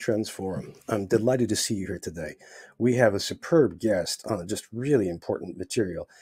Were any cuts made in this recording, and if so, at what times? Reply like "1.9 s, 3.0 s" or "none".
none